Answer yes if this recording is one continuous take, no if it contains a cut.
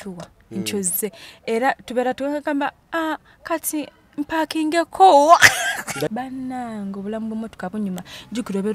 no